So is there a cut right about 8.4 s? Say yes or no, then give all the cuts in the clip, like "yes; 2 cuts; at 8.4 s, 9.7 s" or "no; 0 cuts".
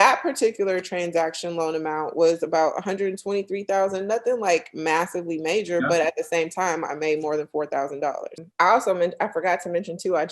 yes; 1 cut; at 8.4 s